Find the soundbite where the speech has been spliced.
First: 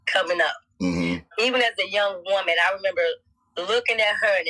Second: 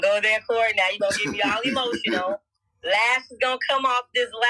first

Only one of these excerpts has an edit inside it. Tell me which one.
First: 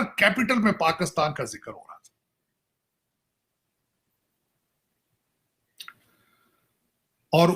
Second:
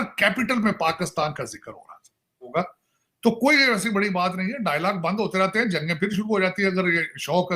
second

